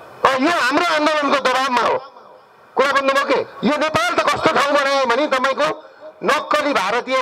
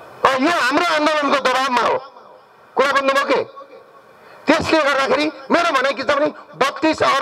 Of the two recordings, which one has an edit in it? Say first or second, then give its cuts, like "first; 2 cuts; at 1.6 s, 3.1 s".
first; 1 cut; at 3.5 s